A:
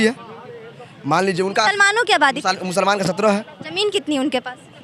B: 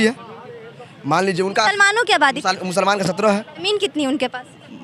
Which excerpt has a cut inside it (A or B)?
B